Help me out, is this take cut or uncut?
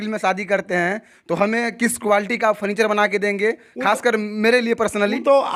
uncut